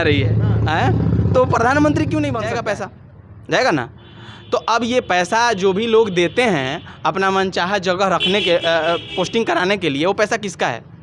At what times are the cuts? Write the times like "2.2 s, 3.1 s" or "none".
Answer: 2.6 s